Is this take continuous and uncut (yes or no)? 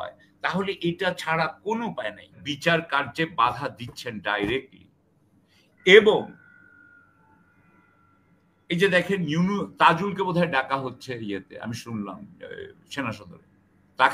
no